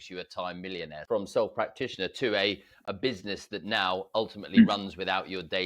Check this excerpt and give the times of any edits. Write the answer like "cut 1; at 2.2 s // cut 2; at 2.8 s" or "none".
cut 1; at 0.9 s